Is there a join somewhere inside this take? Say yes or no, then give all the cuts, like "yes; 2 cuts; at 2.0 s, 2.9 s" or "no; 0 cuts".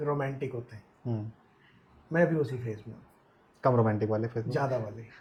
no; 0 cuts